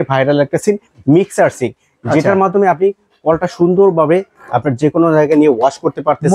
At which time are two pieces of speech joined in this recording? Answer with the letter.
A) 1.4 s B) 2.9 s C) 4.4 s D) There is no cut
D